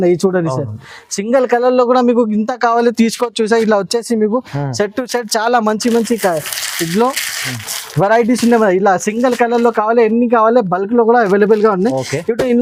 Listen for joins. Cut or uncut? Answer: uncut